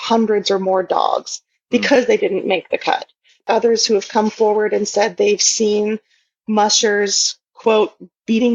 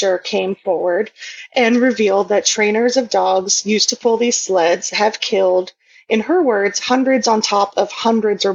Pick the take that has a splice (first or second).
first